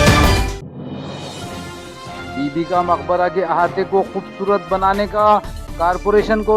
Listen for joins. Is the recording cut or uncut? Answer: cut